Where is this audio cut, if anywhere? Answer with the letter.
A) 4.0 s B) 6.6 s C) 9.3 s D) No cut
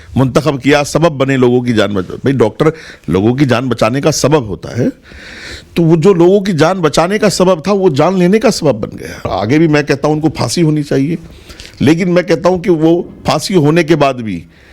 C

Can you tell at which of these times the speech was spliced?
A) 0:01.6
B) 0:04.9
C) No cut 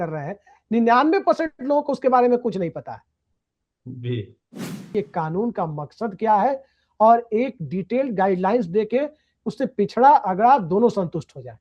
B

